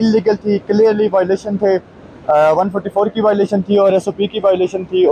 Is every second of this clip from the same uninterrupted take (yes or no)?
yes